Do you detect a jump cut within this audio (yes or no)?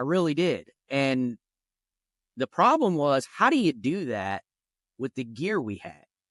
no